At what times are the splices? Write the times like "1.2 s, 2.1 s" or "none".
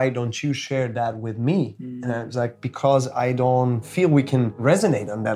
3.9 s